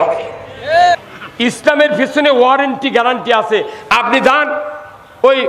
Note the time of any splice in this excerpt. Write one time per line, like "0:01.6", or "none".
0:01.0